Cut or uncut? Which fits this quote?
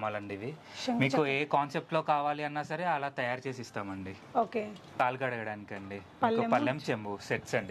cut